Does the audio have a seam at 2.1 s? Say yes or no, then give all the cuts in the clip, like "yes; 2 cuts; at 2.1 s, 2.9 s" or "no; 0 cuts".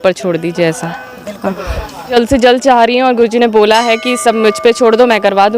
yes; 1 cut; at 2.1 s